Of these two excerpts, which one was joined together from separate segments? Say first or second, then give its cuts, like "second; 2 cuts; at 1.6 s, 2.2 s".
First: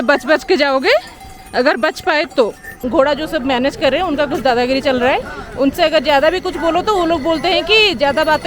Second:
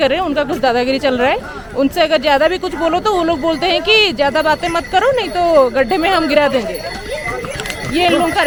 first; 1 cut; at 2.9 s